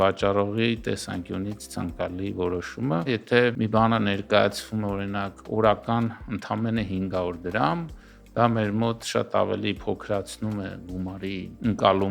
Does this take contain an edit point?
yes; 1 cut; at 3.4 s

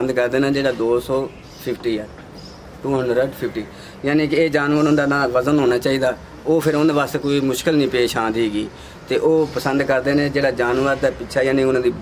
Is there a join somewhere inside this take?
no; 0 cuts

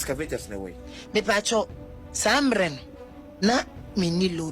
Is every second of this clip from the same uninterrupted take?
no; 1 cut; at 3.4 s

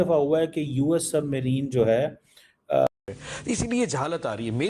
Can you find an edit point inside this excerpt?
yes; 1 cut; at 2.9 s

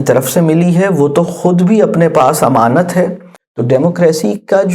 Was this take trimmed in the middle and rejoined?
yes; 1 cut; at 3.3 s

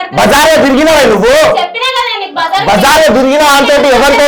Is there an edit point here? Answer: no; 0 cuts

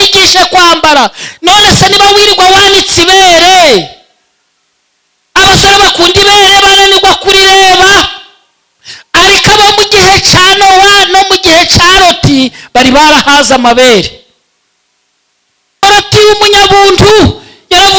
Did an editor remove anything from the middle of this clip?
yes; 1 cut; at 15.8 s

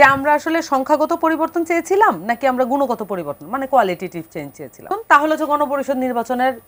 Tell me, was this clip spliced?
yes; 1 cut; at 4.9 s

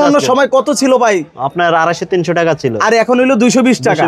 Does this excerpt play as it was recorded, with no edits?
yes; 0 cuts

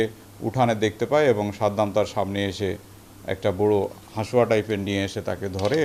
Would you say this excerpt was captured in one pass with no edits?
yes; 0 cuts

